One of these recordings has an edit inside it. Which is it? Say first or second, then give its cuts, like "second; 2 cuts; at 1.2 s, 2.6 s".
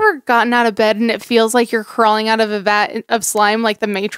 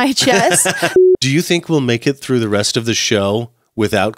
second; 1 cut; at 0.9 s